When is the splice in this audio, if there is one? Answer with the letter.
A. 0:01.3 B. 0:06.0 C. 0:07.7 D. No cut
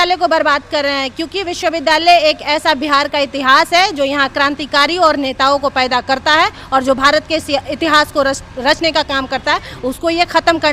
D